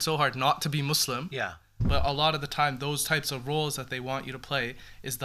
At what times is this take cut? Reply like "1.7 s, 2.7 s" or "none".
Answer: 1.8 s